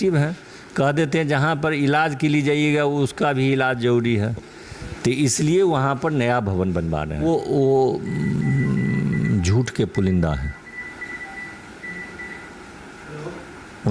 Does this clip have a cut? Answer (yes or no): yes